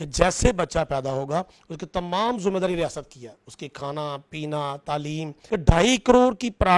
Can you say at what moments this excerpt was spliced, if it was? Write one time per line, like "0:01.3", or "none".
0:05.4